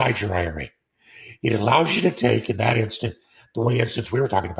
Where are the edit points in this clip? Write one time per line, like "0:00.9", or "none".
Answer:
none